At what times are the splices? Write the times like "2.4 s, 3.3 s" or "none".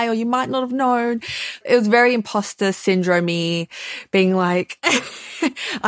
1.6 s